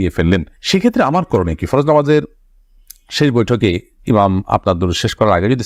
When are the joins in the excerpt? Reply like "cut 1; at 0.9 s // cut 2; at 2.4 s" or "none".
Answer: none